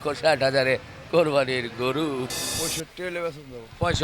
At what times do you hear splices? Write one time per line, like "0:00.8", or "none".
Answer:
0:02.4